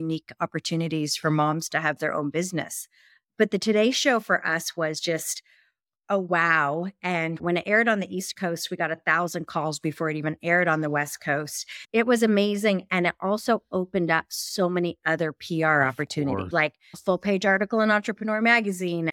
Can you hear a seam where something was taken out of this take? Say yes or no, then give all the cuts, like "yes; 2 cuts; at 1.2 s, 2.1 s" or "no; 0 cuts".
yes; 3 cuts; at 7.4 s, 11.9 s, 16.9 s